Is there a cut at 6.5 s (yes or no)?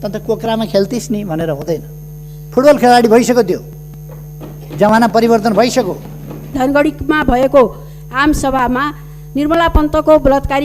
yes